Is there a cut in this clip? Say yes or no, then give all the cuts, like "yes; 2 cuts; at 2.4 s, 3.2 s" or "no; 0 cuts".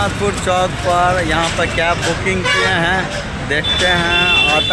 no; 0 cuts